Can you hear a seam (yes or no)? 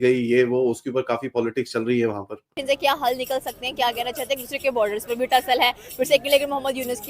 yes